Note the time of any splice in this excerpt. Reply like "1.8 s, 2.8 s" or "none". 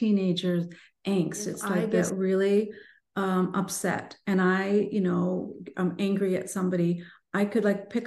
2.0 s